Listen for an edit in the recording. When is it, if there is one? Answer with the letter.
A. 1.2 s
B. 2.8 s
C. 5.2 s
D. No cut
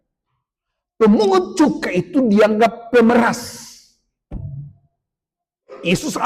D